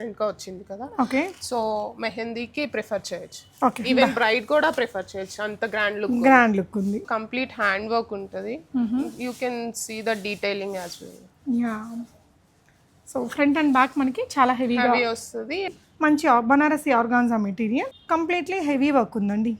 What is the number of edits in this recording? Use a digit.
3